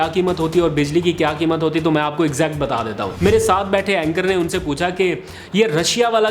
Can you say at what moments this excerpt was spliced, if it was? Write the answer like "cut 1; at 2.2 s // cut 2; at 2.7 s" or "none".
cut 1; at 3.1 s